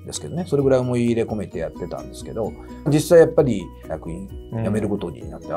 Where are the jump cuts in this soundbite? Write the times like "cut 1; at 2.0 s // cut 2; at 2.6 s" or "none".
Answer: none